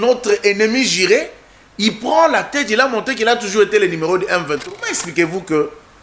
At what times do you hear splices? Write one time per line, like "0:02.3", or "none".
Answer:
0:04.6

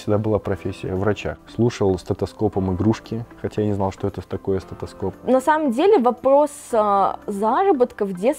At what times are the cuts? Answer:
0:01.3
0:05.1

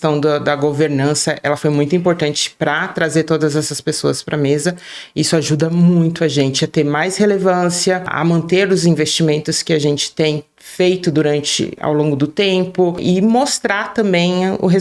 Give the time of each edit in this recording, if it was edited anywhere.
none

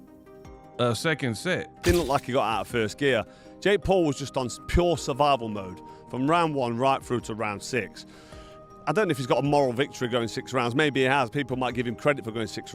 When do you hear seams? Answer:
0:01.7

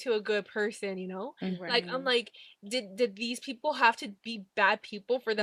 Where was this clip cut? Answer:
none

